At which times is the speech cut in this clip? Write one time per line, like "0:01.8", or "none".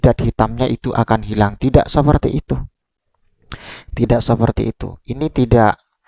none